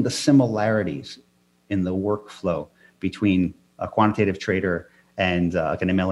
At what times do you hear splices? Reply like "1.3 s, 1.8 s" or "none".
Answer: none